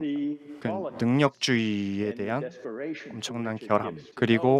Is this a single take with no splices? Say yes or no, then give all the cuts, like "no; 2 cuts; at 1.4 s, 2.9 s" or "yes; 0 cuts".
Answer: yes; 0 cuts